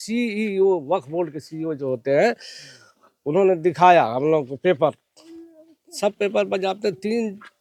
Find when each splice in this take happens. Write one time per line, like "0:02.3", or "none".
none